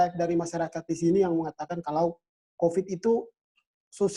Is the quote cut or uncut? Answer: uncut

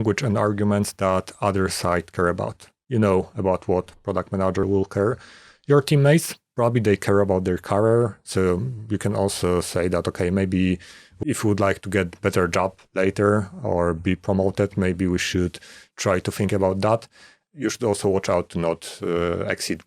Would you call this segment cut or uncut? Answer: cut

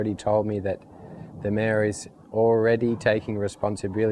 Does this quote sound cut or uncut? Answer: uncut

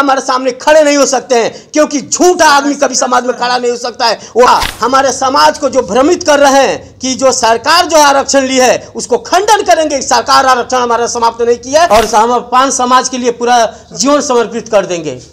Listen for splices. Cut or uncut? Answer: cut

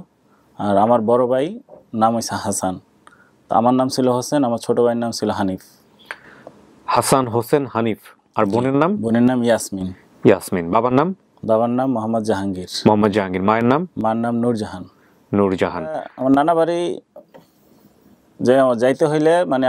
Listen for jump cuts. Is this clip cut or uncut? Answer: cut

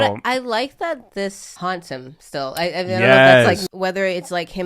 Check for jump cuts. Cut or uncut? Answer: cut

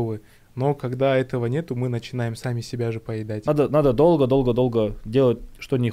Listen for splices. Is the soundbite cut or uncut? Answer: cut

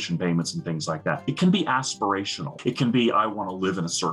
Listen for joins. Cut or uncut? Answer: cut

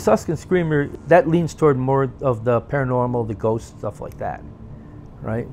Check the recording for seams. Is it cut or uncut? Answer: cut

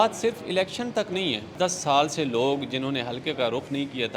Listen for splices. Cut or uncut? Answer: cut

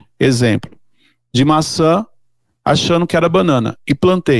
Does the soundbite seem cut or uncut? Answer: uncut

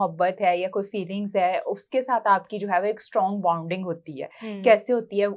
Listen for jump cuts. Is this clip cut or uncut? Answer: uncut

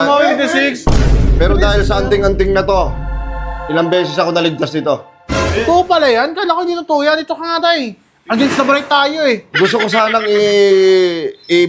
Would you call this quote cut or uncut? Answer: uncut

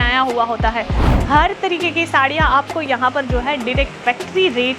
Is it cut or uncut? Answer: cut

